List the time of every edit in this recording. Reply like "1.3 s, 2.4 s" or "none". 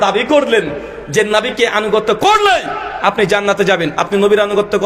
none

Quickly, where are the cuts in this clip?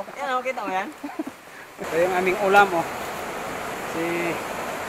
1.8 s

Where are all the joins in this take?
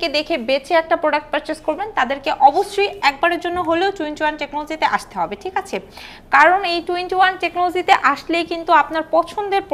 none

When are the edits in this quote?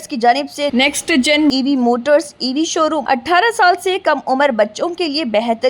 3.0 s

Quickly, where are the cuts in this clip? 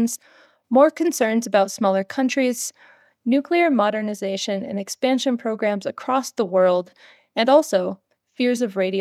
none

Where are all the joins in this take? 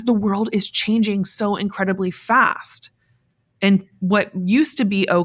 none

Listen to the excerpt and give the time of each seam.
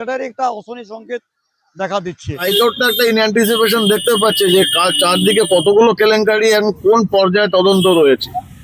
2.4 s

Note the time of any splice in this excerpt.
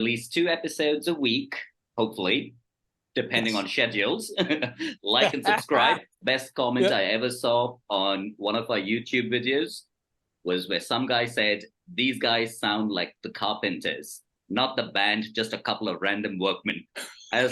6.1 s

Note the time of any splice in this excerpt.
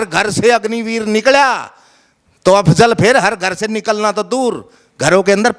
none

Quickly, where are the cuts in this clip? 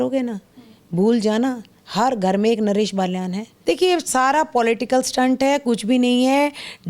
3.5 s

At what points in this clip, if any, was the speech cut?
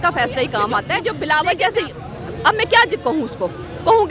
1.0 s

